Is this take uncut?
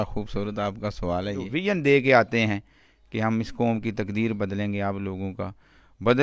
no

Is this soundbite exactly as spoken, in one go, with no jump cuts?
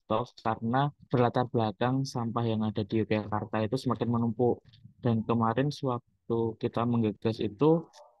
no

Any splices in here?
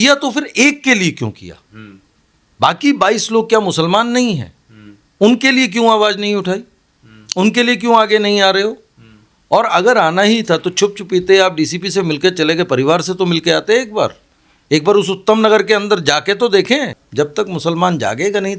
yes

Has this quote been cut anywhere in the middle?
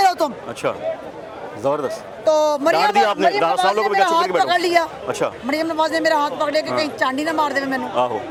no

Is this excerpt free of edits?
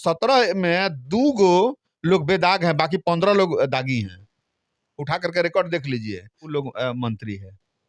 no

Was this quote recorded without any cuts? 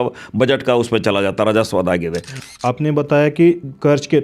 no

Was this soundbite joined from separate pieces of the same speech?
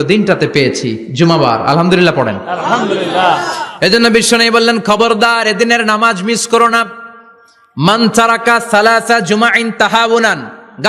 no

